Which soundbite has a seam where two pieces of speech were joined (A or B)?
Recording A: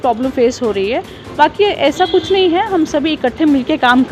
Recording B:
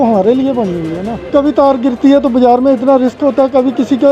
B